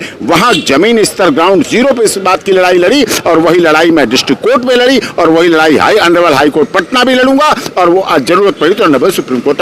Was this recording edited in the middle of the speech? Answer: no; 0 cuts

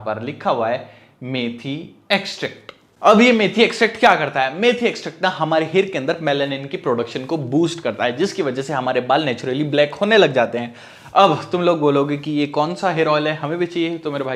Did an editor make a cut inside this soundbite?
no; 0 cuts

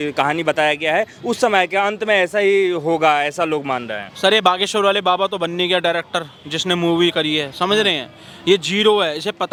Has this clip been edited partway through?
no; 0 cuts

